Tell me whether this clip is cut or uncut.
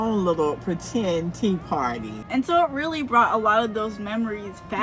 cut